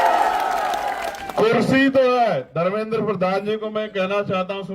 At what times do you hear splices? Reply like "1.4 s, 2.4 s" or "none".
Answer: 1.2 s

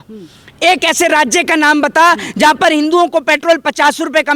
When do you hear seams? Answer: none

